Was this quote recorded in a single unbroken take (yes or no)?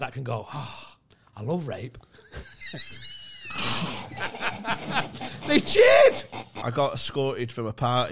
no